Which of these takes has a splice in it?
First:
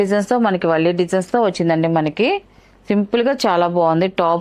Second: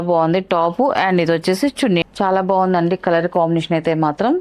second; 1 cut; at 2.0 s

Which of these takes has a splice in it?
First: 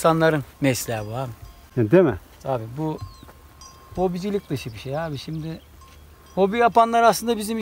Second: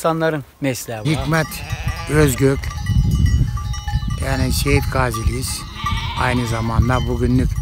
second; 1 cut; at 1.1 s

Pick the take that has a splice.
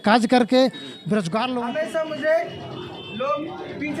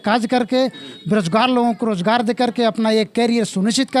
first; 1 cut; at 1.5 s

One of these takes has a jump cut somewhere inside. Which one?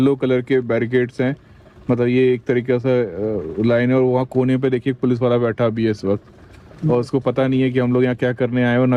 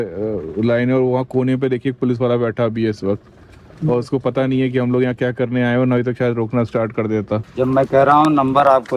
second; 1 cut; at 7.5 s

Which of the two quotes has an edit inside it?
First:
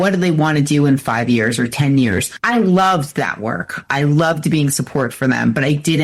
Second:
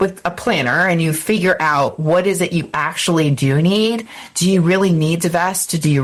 first; 1 cut; at 2.3 s

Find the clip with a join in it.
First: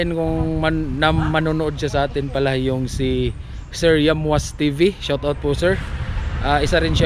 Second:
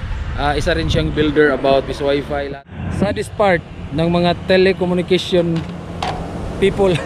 second; 1 cut; at 2.3 s

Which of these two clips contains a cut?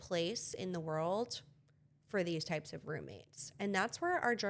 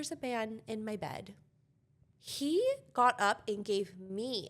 second; 1 cut; at 1.7 s

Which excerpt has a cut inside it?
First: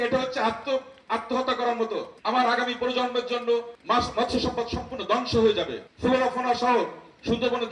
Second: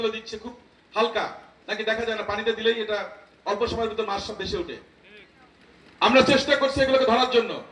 first; 3 cuts; at 2.1 s, 3.7 s, 5.8 s

